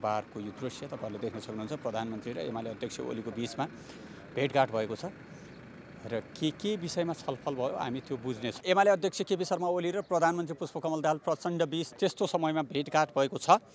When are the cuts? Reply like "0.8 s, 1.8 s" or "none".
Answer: 8.6 s